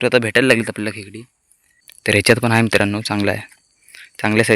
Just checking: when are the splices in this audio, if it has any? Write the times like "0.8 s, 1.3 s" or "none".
2.1 s